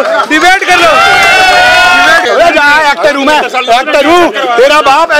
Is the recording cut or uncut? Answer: cut